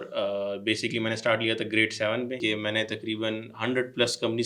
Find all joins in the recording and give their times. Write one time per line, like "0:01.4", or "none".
0:02.4